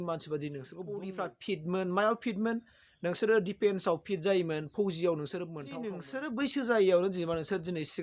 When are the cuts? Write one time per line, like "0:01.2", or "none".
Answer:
0:01.0
0:06.0